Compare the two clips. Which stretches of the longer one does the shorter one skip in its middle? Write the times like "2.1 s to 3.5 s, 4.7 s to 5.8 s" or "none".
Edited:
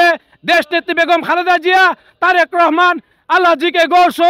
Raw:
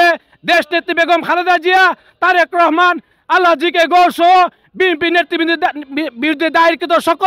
none